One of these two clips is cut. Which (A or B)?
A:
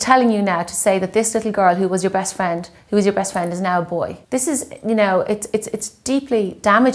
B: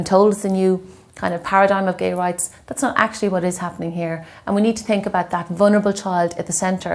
A